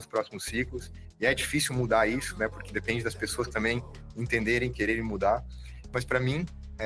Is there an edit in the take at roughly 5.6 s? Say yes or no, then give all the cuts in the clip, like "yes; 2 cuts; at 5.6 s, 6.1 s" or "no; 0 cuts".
no; 0 cuts